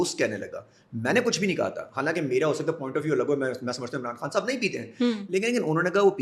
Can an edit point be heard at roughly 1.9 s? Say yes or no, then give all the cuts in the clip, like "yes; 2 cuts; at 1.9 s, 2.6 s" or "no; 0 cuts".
no; 0 cuts